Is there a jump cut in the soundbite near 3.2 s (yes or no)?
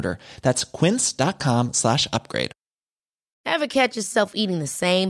yes